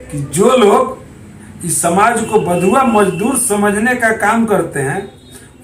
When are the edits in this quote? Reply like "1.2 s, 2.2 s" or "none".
none